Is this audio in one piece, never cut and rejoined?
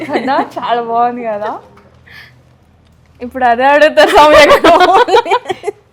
yes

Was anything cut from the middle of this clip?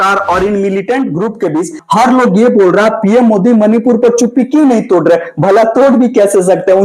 yes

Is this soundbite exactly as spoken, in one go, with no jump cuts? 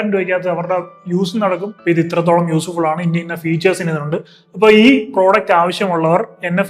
no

